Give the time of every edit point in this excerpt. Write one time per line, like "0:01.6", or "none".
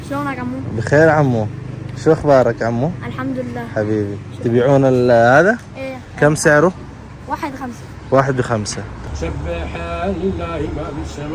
0:09.1